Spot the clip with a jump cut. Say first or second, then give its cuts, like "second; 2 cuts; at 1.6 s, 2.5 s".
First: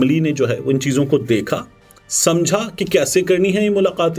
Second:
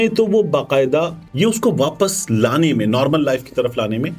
second; 1 cut; at 1.2 s